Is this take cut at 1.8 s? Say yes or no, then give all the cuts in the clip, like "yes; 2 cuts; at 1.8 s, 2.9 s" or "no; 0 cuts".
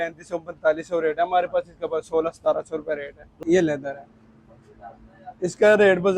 no; 1 cut; at 3.4 s